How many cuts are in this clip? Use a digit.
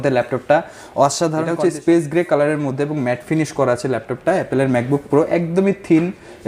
1